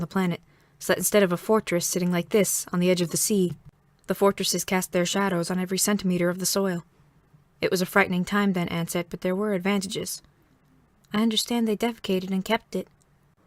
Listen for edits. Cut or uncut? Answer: uncut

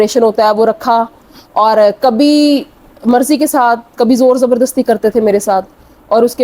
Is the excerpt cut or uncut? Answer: uncut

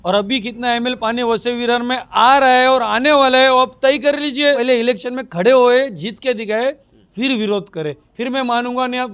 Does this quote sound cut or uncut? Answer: cut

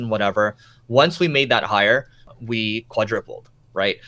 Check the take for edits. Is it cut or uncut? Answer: cut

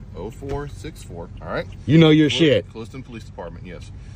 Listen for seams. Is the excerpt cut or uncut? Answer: uncut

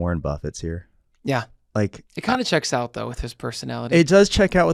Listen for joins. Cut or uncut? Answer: uncut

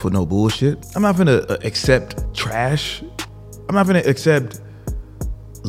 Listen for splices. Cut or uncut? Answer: cut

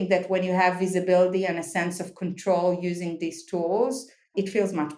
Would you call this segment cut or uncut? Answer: uncut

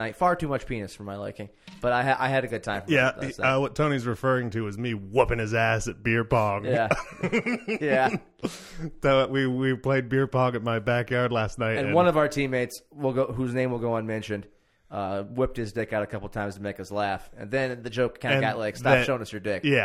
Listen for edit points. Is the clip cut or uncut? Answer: uncut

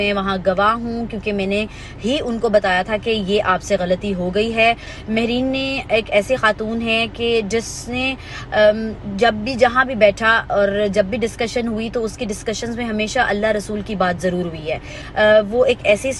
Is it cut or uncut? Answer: cut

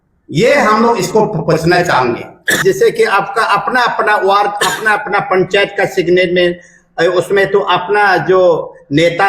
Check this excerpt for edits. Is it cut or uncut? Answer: cut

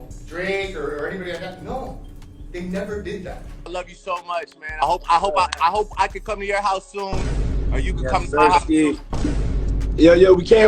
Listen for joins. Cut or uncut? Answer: cut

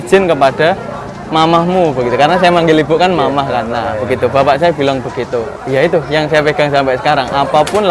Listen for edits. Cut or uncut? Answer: cut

